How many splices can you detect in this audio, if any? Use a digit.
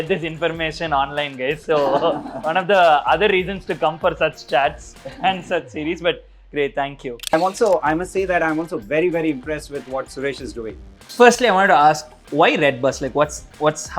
2